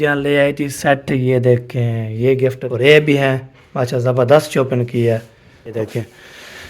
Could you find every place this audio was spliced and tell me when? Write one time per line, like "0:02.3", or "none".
0:02.6
0:05.7